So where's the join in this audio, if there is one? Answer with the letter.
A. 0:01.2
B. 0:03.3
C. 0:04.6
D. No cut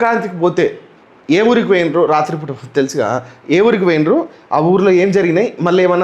B